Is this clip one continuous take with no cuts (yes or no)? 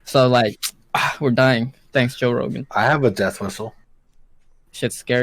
no